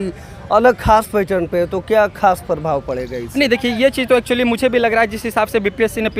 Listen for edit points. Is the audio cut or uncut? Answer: uncut